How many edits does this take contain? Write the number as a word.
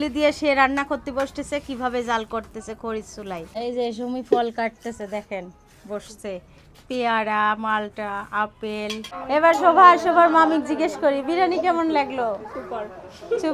two